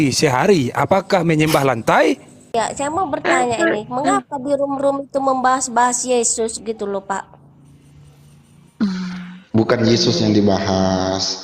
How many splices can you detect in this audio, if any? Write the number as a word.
one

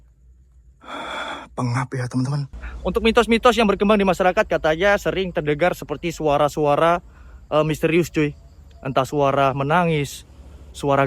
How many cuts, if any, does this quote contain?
one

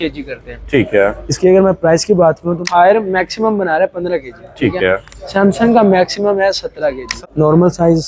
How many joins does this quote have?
two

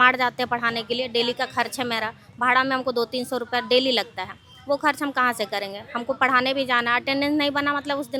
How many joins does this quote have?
zero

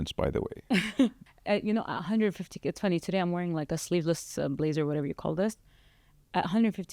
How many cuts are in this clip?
one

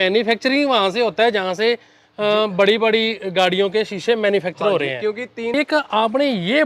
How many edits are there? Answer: one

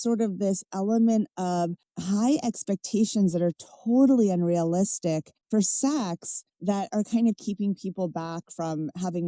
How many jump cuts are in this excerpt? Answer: zero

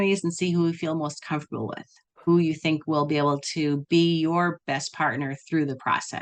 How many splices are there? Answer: zero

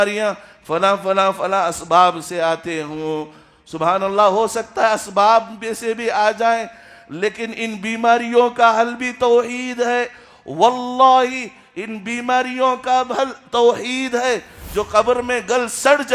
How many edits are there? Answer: one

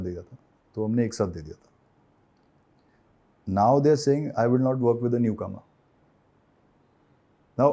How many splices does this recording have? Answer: zero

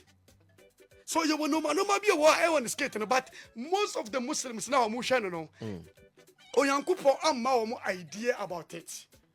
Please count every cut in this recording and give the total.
zero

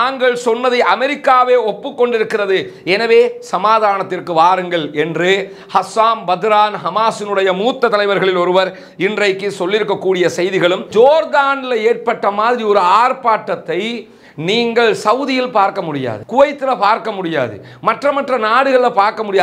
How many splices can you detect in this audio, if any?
one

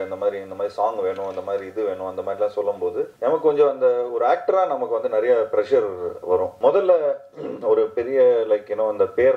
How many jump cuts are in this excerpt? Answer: two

